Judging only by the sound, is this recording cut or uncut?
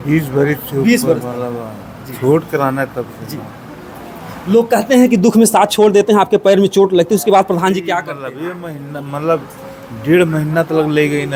uncut